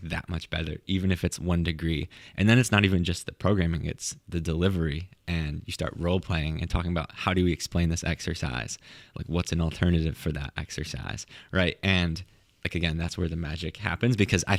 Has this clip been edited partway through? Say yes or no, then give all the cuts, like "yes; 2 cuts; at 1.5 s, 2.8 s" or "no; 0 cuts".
no; 0 cuts